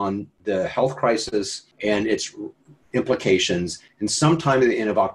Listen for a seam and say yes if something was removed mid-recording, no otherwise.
yes